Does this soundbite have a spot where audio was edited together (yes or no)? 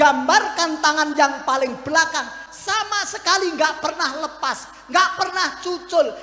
no